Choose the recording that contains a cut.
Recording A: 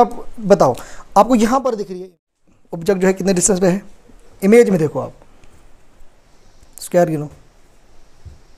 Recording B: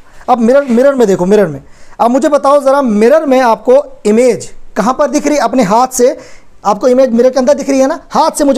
A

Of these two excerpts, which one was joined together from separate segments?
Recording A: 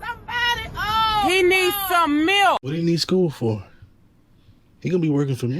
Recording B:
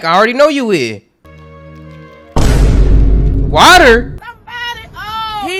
A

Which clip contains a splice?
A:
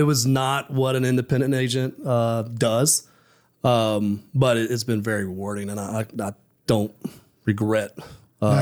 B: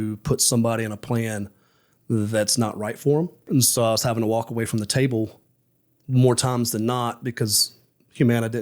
B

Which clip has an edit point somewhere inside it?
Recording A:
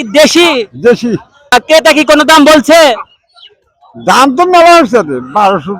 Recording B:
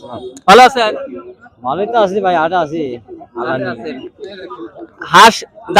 A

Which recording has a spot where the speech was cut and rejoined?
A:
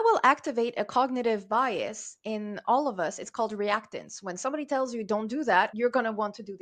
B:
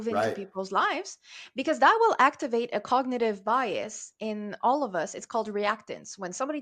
A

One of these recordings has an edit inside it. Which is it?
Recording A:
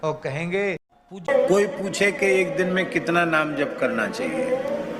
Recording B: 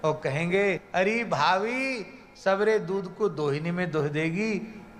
A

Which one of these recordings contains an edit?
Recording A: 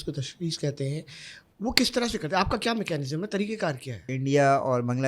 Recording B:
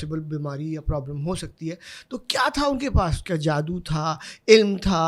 A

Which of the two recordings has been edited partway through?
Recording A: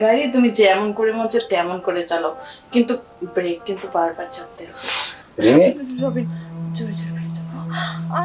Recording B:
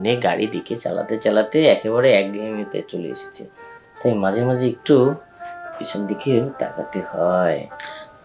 A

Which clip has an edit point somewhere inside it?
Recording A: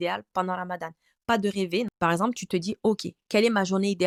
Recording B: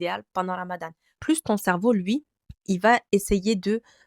B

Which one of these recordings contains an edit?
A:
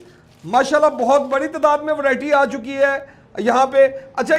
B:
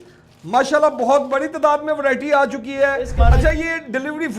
B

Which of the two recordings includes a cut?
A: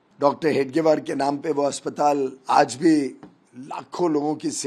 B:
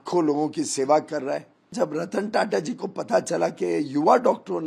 B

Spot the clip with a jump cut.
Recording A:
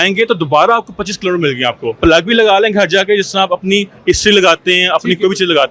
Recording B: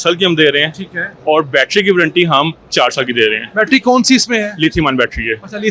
A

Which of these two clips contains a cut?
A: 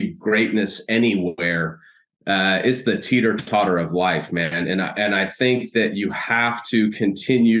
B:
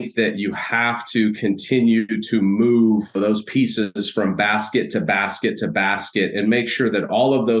B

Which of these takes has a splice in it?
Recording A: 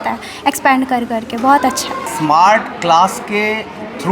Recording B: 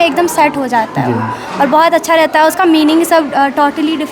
A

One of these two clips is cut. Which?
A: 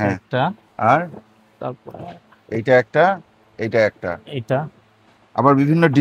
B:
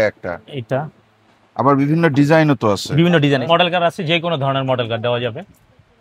B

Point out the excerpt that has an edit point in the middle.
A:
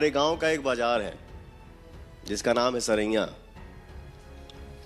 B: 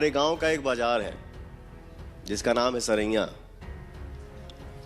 B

